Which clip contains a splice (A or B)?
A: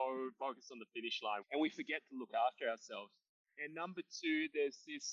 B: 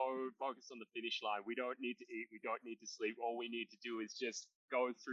A